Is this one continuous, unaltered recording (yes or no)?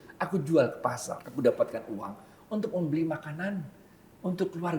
no